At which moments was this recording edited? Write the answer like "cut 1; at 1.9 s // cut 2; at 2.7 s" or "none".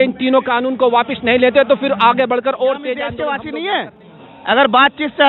cut 1; at 3.1 s